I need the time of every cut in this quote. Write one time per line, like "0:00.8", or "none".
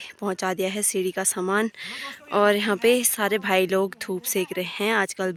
none

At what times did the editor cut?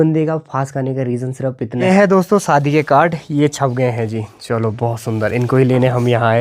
0:01.8

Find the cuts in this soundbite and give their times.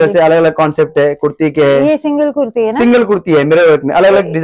none

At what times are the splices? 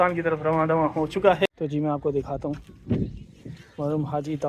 0:01.5

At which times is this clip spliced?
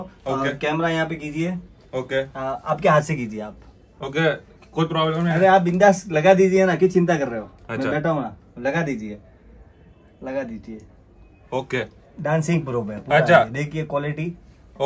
none

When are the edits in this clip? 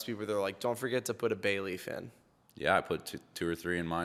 none

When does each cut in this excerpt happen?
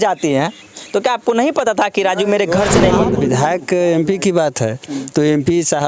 0:03.1

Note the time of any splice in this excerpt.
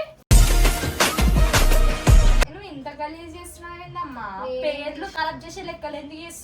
0:02.4

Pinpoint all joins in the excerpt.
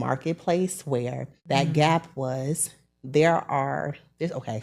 0:01.3

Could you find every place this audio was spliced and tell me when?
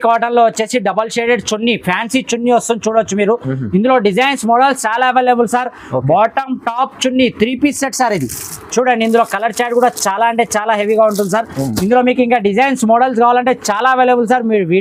none

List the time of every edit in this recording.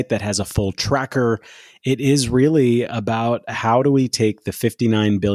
none

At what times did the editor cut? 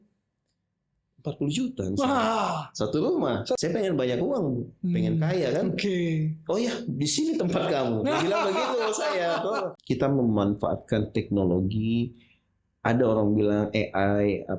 0:03.6
0:09.7

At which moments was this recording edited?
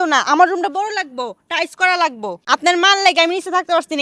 0:02.3

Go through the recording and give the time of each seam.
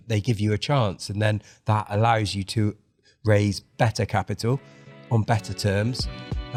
none

